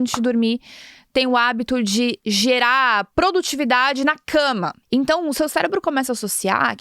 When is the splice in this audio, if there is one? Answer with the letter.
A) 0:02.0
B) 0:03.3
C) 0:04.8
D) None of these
C